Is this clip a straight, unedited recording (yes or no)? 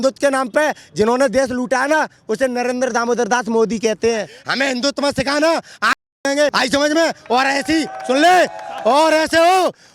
no